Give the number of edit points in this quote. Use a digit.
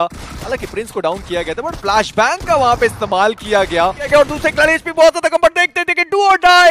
1